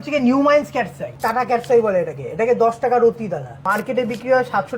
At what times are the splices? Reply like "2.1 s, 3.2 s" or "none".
1.2 s, 3.6 s